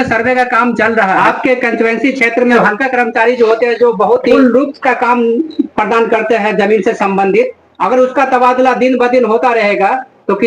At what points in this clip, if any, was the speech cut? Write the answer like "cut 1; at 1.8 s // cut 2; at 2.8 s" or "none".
cut 1; at 1.2 s // cut 2; at 2.5 s // cut 3; at 4.4 s